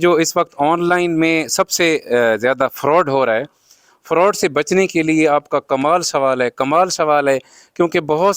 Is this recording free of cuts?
yes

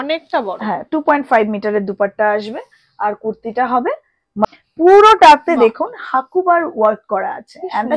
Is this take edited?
yes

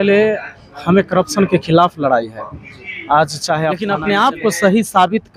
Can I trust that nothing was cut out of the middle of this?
no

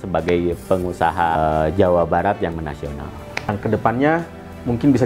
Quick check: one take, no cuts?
no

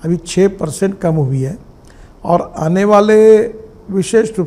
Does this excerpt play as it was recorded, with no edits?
yes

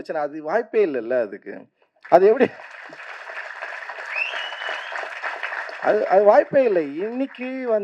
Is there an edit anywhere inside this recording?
no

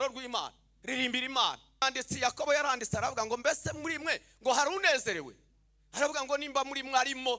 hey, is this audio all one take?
no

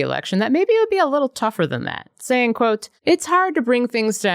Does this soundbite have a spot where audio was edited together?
yes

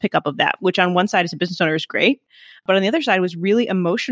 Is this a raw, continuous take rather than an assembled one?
yes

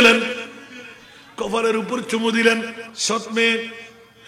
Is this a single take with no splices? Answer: no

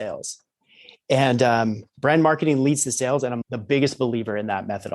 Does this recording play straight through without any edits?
no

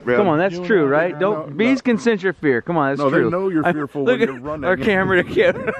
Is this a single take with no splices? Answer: yes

